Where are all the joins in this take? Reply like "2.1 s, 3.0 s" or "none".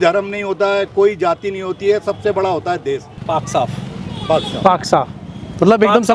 3.1 s